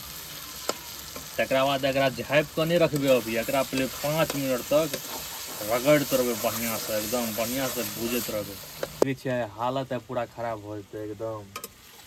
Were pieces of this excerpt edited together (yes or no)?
yes